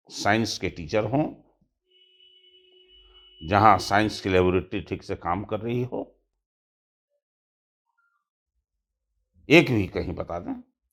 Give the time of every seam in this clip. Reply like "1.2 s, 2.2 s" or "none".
none